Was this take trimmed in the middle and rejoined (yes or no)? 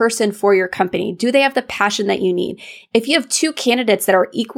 no